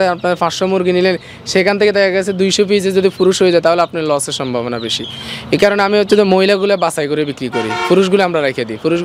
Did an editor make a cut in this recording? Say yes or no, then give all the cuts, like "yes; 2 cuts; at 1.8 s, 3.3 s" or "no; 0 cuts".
no; 0 cuts